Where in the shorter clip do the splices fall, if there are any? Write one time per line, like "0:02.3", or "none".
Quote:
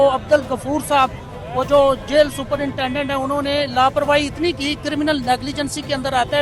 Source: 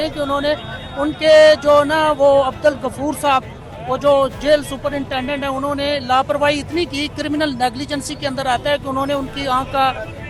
none